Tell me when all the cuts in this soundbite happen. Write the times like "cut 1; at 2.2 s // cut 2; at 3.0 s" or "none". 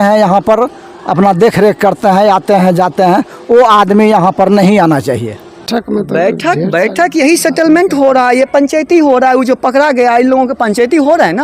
cut 1; at 5.7 s